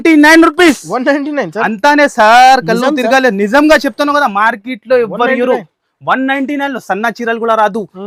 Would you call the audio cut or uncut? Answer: uncut